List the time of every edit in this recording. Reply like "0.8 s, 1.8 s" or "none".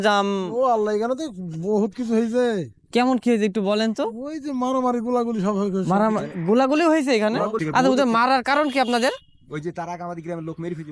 7.6 s